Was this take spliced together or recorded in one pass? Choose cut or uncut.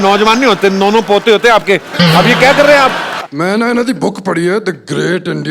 cut